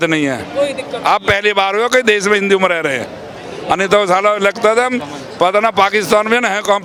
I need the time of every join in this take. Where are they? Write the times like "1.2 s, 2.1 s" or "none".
none